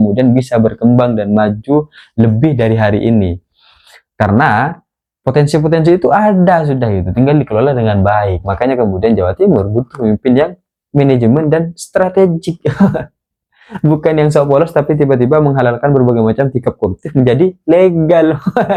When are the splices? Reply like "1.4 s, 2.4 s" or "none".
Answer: none